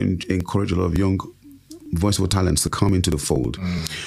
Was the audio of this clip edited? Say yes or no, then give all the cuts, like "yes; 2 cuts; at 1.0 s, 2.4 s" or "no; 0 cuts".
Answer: no; 0 cuts